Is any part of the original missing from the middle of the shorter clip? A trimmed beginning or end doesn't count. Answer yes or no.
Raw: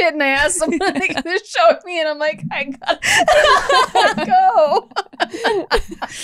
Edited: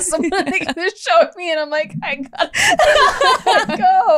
no